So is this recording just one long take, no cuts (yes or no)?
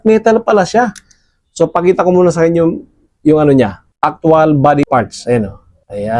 no